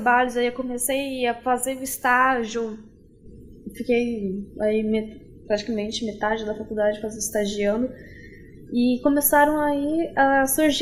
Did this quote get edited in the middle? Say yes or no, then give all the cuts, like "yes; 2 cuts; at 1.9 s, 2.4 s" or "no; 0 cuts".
no; 0 cuts